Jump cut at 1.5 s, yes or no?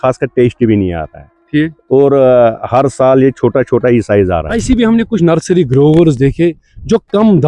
no